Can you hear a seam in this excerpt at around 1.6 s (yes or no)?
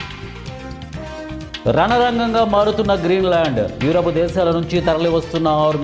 yes